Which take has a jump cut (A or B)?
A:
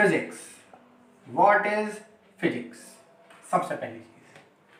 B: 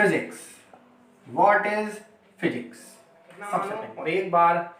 B